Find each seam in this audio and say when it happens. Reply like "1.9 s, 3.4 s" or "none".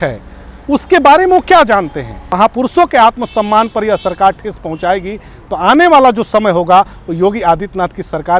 2.2 s